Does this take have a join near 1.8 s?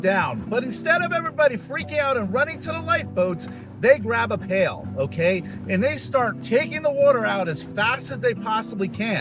no; 1 cut; at 6.4 s

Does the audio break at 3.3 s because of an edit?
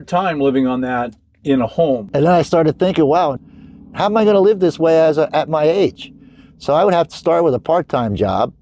yes; 2 cuts; at 2.1 s, 3.3 s

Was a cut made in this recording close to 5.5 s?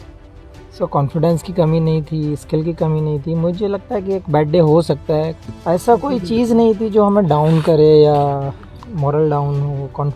yes; 1 cut; at 5.5 s

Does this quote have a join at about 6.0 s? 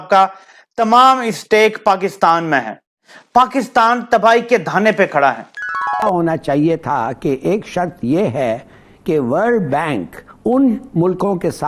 yes; 1 cut; at 6.0 s

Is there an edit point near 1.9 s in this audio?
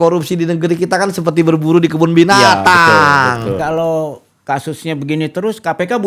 no; 1 cut; at 3.5 s

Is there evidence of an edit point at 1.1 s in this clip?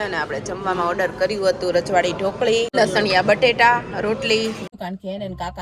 no; 2 cuts; at 2.7 s, 4.6 s

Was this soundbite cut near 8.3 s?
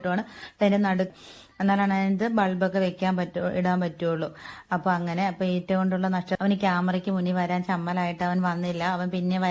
no; 2 cuts; at 1.1 s, 6.3 s

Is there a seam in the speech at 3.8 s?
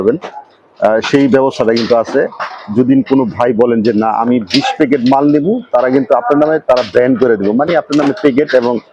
no; 0 cuts

